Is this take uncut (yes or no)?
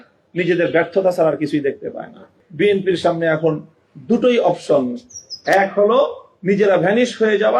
no